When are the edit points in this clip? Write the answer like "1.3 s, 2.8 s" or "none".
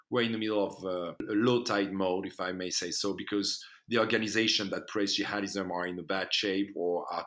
1.2 s